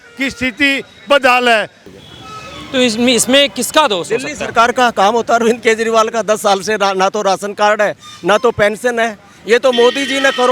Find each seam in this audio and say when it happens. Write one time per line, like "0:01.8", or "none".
0:01.9